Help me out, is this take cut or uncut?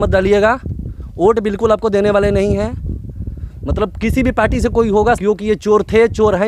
uncut